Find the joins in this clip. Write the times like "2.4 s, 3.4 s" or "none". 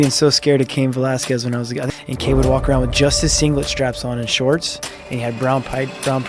1.8 s